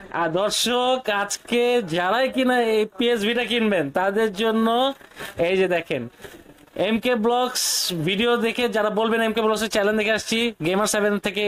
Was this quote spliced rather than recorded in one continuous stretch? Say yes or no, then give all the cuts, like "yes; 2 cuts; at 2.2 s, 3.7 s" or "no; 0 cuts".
no; 0 cuts